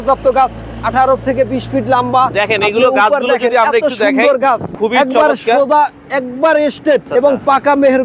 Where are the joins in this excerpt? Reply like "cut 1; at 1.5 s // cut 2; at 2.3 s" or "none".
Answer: cut 1; at 4.7 s // cut 2; at 7.1 s